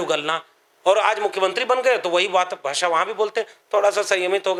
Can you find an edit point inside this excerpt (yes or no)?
no